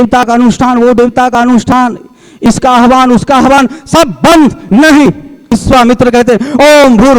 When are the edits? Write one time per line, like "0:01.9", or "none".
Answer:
0:05.5